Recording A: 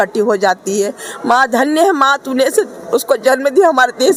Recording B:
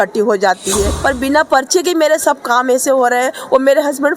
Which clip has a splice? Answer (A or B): B